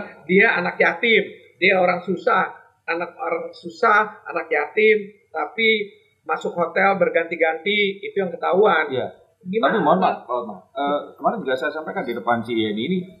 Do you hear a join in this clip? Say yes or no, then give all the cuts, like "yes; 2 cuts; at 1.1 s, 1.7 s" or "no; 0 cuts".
no; 0 cuts